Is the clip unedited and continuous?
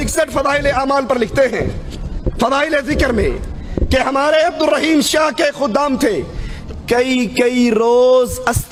yes; 0 cuts

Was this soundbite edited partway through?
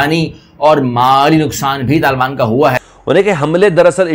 yes; 1 cut; at 2.8 s

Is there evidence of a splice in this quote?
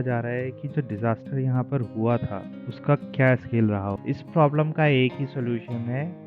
yes; 1 cut; at 4.0 s

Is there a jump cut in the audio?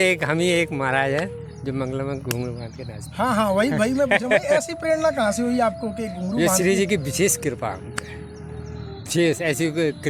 no; 0 cuts

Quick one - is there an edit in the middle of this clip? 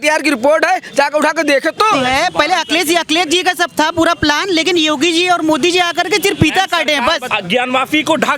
yes; 2 cuts; at 1.9 s, 7.2 s

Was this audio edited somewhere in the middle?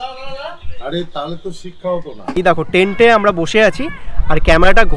yes; 1 cut; at 2.3 s

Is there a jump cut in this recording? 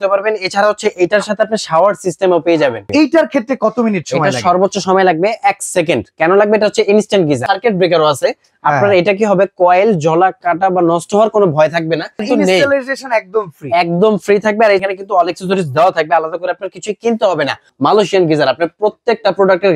yes; 5 cuts; at 2.9 s, 7.4 s, 12.2 s, 14.8 s, 17.7 s

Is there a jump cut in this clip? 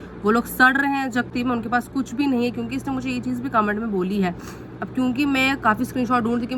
no; 0 cuts

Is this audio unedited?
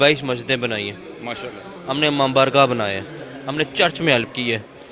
yes; 0 cuts

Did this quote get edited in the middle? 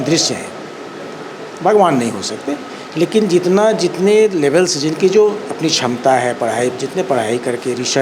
no; 0 cuts

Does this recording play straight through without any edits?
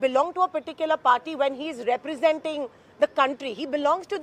yes; 0 cuts

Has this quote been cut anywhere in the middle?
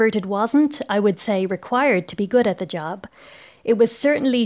no; 0 cuts

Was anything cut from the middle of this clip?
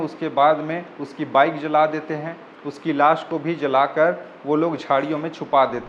no; 0 cuts

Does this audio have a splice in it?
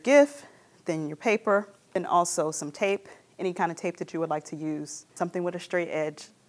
yes; 2 cuts; at 1.8 s, 5.1 s

